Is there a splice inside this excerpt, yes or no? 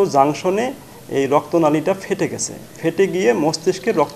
no